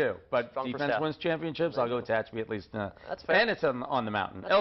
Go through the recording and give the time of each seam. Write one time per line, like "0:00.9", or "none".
none